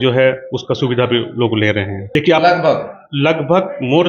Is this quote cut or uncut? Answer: cut